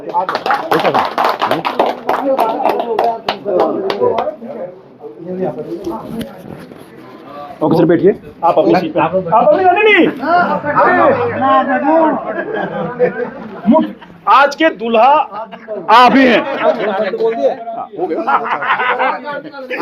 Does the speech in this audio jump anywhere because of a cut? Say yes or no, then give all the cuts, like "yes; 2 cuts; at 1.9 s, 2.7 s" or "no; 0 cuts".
no; 0 cuts